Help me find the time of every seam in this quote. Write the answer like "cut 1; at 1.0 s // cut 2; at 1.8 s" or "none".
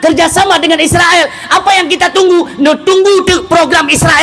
none